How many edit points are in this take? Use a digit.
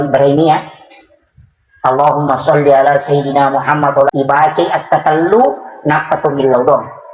1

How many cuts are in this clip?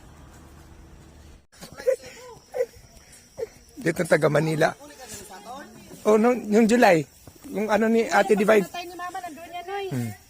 1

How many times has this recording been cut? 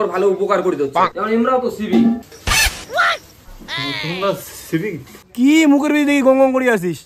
1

